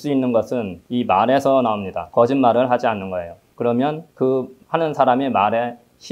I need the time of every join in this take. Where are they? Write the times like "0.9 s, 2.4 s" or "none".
2.0 s

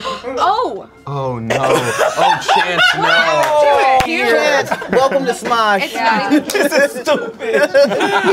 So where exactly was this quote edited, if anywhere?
4.0 s, 6.5 s

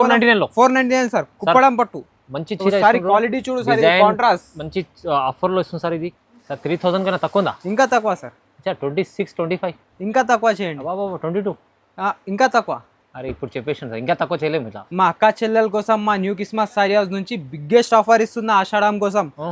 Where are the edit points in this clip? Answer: 6.1 s

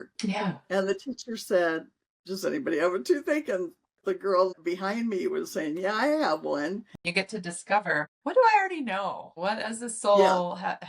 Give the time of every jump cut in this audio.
7.0 s

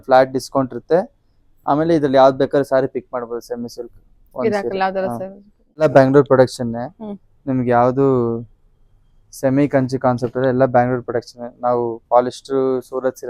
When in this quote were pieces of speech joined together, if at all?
5.8 s

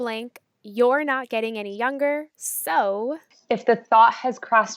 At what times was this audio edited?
3.3 s

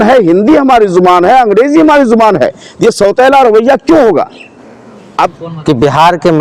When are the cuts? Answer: 5.2 s

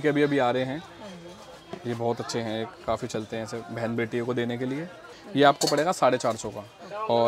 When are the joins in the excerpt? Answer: 5.1 s

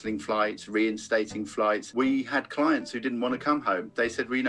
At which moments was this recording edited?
1.9 s

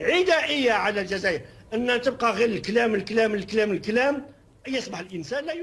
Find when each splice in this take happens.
none

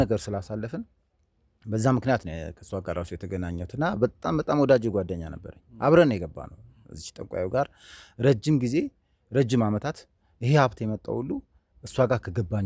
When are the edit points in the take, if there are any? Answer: none

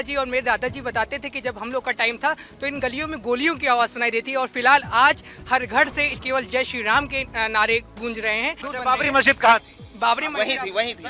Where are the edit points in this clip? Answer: 8.7 s

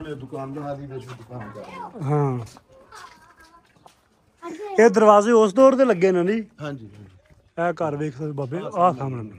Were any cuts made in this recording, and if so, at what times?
none

